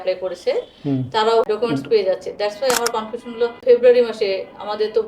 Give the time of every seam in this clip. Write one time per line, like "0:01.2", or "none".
0:01.5
0:03.6